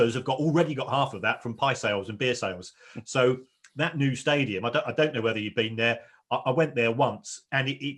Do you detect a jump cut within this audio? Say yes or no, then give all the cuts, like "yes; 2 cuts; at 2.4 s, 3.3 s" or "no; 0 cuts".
no; 0 cuts